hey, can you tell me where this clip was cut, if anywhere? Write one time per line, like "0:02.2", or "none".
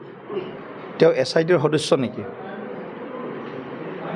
none